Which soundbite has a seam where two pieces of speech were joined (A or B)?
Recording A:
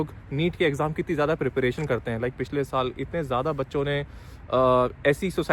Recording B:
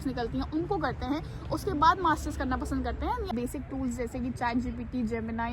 B